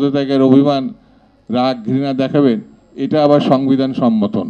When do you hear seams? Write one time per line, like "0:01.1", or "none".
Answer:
none